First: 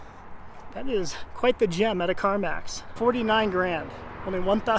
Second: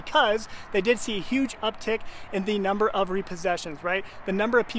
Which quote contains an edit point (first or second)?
first